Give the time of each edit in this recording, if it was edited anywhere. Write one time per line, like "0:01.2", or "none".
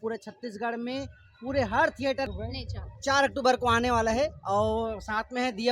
0:02.3